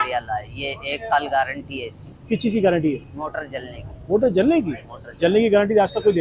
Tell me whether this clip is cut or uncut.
uncut